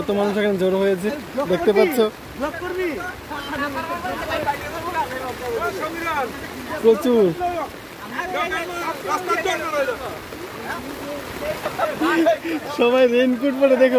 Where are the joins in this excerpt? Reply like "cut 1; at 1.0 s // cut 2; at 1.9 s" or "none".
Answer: none